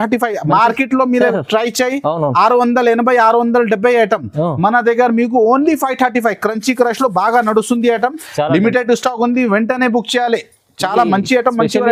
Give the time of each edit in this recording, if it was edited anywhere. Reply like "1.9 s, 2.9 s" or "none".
none